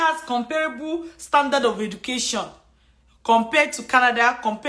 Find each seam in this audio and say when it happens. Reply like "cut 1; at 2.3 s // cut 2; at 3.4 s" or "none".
none